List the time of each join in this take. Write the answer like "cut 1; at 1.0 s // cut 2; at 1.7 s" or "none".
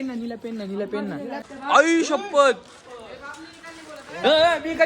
cut 1; at 1.5 s